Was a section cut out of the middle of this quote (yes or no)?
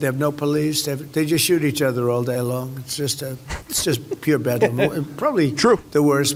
no